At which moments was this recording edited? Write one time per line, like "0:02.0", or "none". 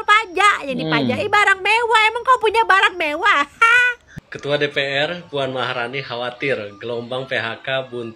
0:04.1